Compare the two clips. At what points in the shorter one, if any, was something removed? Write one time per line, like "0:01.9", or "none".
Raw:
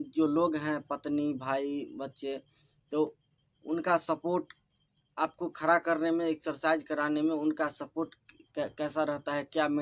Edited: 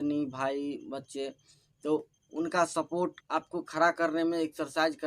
0:02.2
0:03.2